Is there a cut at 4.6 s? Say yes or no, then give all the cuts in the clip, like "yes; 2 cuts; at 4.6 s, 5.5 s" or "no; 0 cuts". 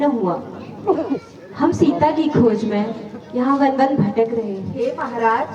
yes; 1 cut; at 4.6 s